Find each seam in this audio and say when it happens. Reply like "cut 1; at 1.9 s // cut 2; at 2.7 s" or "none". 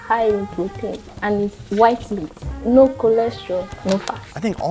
none